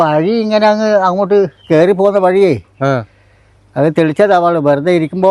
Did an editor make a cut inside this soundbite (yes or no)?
no